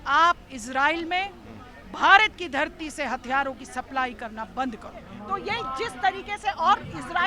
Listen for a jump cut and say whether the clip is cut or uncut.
cut